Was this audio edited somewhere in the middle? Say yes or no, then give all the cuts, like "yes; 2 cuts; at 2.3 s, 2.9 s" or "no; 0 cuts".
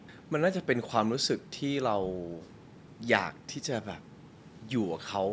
no; 0 cuts